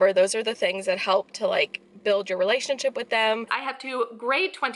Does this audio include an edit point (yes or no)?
yes